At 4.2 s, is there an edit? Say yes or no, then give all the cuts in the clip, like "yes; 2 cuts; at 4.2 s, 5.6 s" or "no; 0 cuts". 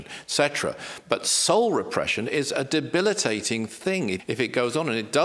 yes; 1 cut; at 4.2 s